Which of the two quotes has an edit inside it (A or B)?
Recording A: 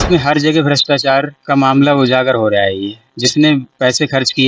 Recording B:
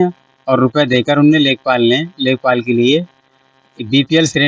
A